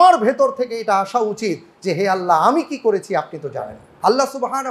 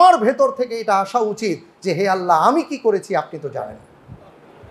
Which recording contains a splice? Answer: first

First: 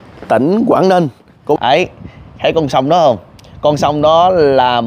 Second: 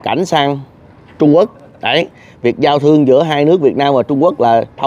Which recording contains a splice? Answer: first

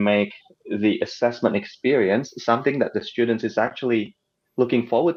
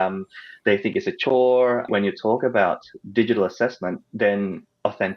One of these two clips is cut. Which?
second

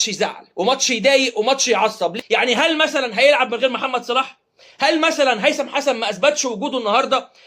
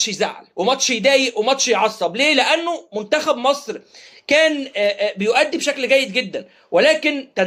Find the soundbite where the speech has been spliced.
first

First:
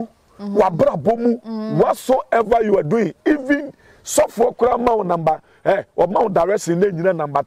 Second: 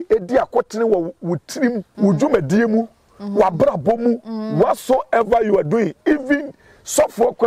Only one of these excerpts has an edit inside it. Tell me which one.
second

